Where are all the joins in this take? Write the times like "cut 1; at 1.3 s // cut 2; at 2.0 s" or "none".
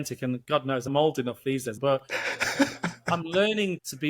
cut 1; at 1.8 s